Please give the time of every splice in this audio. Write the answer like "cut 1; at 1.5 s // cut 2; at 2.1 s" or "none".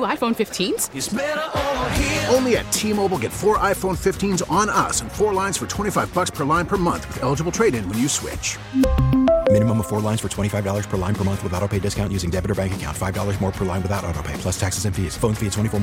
none